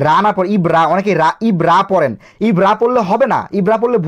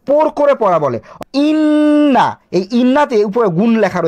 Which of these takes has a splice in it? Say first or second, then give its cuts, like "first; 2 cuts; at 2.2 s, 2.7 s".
second; 1 cut; at 1.2 s